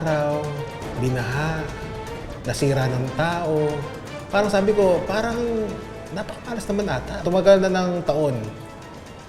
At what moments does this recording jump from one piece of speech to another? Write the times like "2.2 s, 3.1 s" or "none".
7.2 s